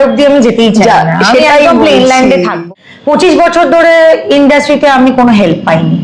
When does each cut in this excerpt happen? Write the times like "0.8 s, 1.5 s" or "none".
2.6 s